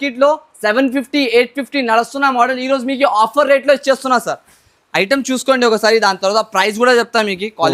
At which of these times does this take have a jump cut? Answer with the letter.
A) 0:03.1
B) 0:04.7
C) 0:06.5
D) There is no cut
D